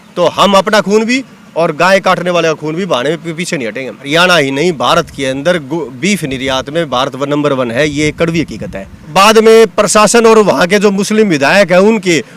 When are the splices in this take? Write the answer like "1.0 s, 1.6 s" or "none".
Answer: 4.0 s, 9.1 s